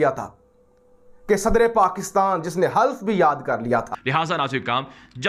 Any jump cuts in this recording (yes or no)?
yes